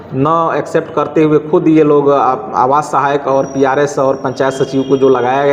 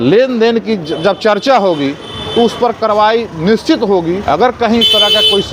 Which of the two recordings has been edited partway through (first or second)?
second